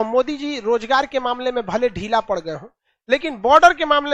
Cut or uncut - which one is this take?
uncut